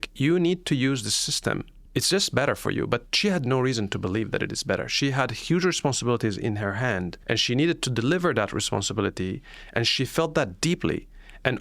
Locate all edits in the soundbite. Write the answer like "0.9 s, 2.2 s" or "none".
1.8 s, 7.2 s